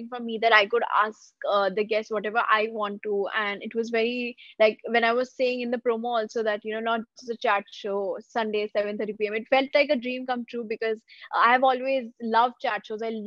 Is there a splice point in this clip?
no; 0 cuts

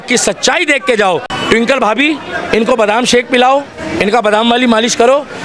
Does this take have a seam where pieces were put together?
yes; 1 cut; at 1.2 s

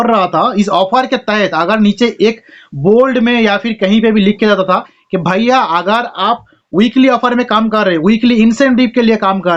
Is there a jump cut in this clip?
no; 0 cuts

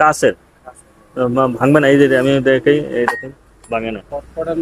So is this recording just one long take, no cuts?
no; 1 cut; at 3.6 s

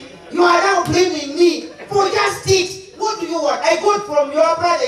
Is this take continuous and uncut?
yes; 0 cuts

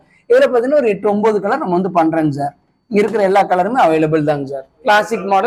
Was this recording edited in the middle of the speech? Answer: no; 0 cuts

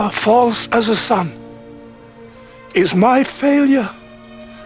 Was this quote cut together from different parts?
no; 0 cuts

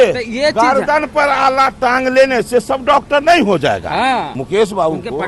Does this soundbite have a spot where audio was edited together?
yes; 1 cut; at 4.4 s

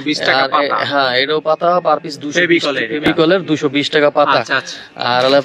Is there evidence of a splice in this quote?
no; 0 cuts

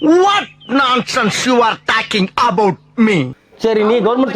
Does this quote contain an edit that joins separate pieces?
yes; 1 cut; at 3.3 s

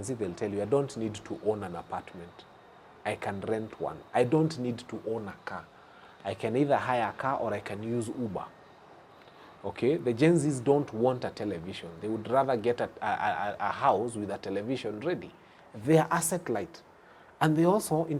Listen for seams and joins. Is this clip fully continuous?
yes; 0 cuts

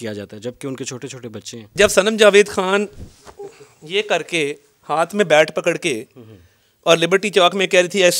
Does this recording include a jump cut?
yes; 1 cut; at 1.7 s

